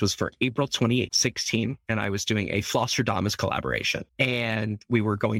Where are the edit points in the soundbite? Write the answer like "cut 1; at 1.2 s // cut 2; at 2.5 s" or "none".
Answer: cut 1; at 1.1 s // cut 2; at 4.0 s